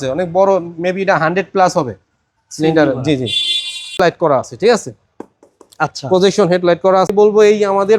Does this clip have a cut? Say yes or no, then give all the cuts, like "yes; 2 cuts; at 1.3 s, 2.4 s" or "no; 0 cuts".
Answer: yes; 2 cuts; at 3.9 s, 7.1 s